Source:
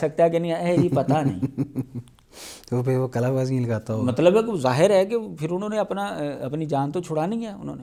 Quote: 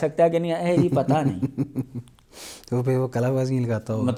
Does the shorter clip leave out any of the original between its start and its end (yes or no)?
no